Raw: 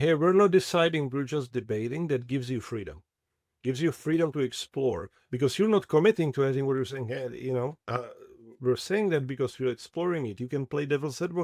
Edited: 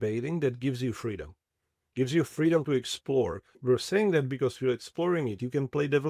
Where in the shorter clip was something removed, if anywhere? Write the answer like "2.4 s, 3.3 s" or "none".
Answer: 3.5 s